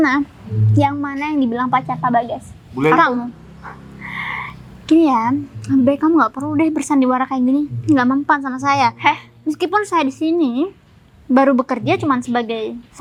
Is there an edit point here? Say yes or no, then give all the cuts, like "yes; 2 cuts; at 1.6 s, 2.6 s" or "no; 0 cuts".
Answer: no; 0 cuts